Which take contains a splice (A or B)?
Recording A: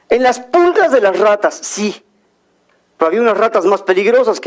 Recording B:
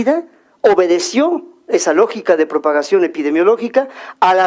B